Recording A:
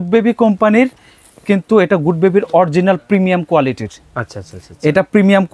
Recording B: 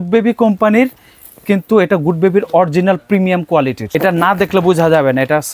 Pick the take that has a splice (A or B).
B